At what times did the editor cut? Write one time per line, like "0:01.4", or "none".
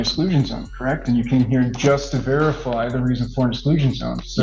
none